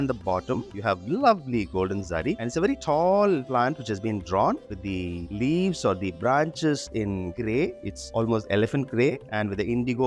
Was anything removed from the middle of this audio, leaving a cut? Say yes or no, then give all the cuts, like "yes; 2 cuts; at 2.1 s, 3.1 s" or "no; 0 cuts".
no; 0 cuts